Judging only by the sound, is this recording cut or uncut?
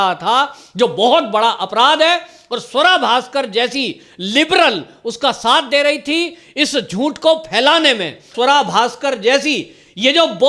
cut